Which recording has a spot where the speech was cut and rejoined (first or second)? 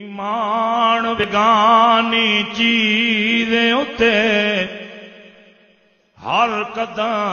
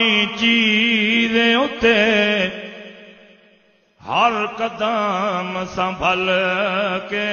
first